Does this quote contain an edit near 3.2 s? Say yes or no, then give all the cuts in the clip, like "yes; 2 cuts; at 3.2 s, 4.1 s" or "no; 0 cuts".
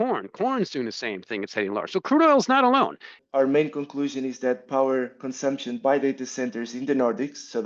yes; 1 cut; at 3.2 s